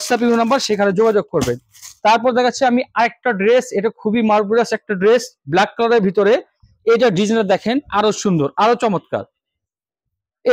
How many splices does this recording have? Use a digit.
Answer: 0